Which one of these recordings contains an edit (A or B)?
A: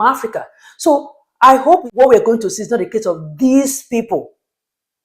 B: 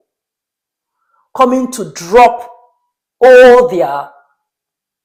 A